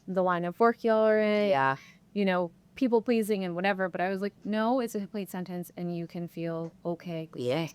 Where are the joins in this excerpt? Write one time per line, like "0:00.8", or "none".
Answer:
0:06.7

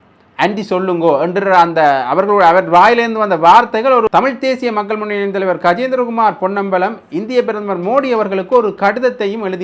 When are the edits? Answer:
0:04.1

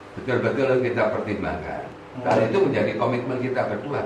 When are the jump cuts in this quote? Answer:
0:01.8

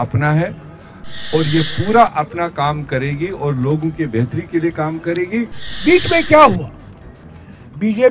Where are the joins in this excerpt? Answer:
0:05.6

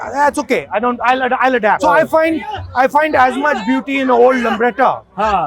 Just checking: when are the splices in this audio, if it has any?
0:01.8

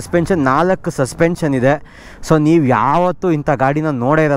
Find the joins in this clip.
none

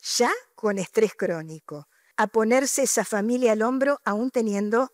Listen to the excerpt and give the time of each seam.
0:02.0

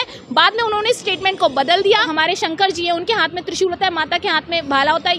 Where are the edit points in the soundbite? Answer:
0:02.1

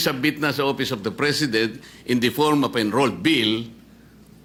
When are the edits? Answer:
none

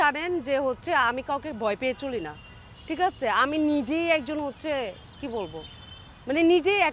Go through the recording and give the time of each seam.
none

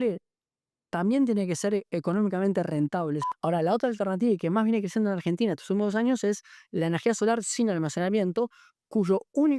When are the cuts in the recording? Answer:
0:03.2

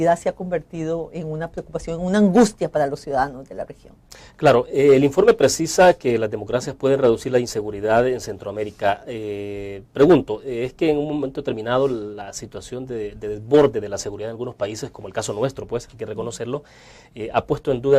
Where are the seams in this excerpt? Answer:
0:06.7

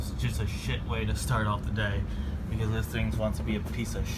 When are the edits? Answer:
none

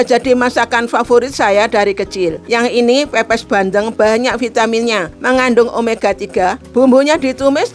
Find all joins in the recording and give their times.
0:02.4
0:05.1
0:06.6

